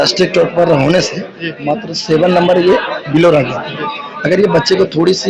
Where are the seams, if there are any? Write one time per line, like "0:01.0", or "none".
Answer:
none